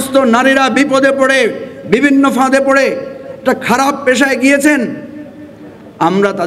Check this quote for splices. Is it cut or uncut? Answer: uncut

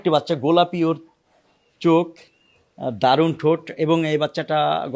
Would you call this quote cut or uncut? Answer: uncut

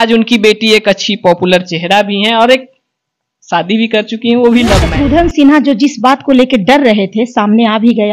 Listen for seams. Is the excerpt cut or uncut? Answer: cut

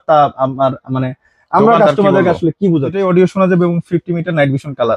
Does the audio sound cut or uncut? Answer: cut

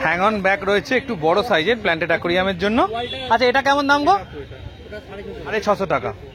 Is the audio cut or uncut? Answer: uncut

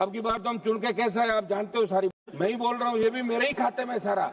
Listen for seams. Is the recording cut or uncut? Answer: cut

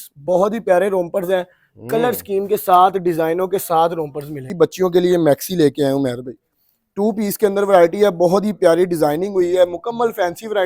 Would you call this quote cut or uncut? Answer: cut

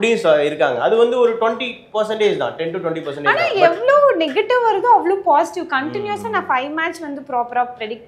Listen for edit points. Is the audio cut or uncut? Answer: uncut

